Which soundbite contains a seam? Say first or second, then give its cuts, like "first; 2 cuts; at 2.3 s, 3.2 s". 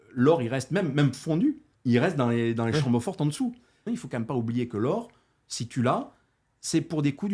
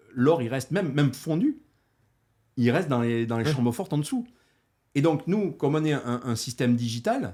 first; 2 cuts; at 1.7 s, 3.9 s